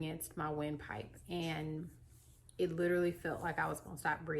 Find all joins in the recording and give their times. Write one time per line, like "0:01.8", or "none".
none